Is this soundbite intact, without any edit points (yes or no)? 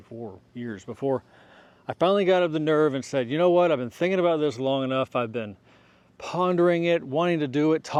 yes